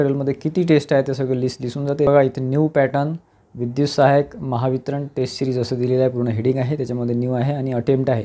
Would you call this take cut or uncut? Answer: uncut